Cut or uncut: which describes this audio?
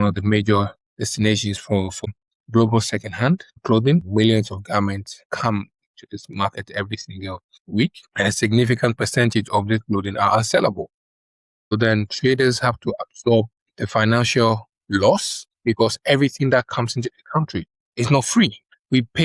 cut